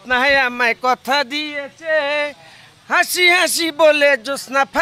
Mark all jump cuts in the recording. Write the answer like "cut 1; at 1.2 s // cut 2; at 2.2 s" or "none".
none